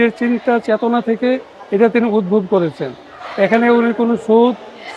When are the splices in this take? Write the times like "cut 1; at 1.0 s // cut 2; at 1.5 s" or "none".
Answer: none